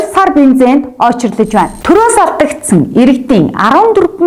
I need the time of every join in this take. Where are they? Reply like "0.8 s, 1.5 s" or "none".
1.8 s